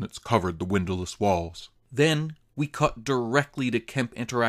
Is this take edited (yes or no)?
no